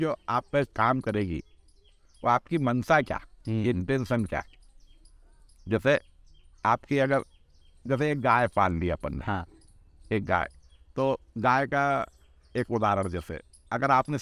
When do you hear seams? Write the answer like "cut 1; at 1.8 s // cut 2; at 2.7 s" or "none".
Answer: none